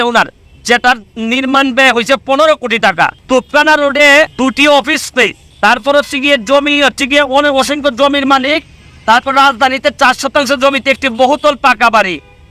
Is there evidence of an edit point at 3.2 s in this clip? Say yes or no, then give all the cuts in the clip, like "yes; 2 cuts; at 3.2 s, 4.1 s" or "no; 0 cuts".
yes; 3 cuts; at 3.2 s, 4.3 s, 5.4 s